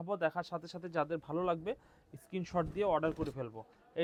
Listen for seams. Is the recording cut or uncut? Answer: uncut